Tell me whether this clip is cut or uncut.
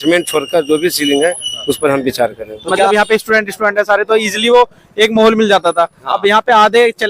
cut